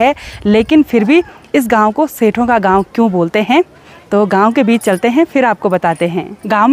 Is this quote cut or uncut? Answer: uncut